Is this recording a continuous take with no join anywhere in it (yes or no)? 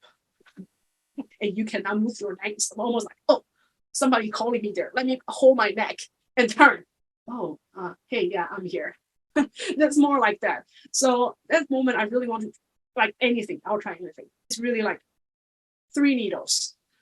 no